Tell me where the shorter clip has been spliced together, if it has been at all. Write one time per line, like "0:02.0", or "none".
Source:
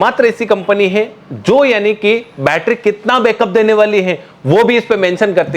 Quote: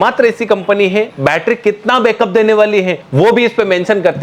0:01.1
0:03.0